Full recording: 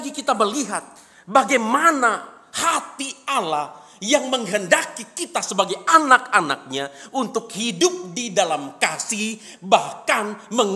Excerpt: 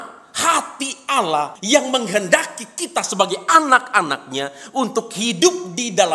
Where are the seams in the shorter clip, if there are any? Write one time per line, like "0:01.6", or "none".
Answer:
0:01.6